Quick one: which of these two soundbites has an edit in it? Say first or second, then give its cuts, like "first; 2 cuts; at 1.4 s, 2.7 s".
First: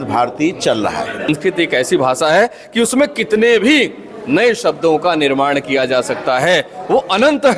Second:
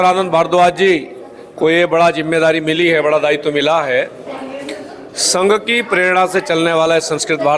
first; 1 cut; at 1.3 s